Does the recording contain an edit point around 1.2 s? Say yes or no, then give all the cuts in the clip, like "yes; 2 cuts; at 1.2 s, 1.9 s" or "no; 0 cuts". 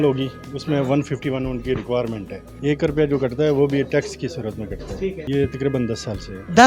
no; 2 cuts; at 2.6 s, 5.2 s